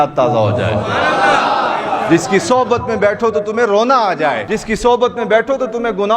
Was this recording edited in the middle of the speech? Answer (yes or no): yes